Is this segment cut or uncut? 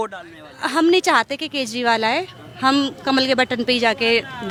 uncut